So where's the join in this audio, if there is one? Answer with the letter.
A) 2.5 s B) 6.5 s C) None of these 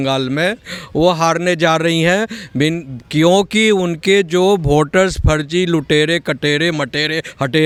C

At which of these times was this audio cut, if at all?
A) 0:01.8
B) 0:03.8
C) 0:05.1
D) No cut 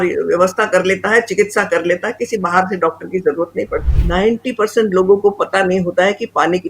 B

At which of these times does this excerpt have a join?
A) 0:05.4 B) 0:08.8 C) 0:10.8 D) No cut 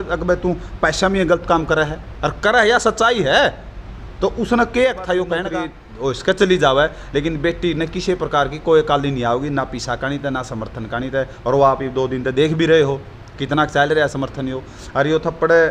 A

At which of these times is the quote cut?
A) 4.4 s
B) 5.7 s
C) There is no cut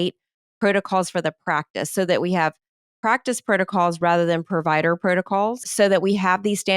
B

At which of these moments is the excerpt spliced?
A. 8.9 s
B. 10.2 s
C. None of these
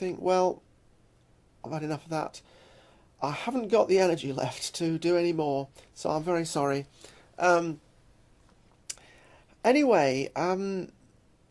B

